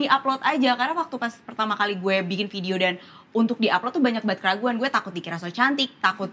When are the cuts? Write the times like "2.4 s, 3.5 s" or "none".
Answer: none